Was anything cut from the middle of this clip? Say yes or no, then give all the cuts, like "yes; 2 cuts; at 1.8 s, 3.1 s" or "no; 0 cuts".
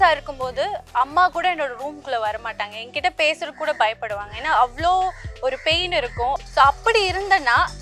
yes; 1 cut; at 6.4 s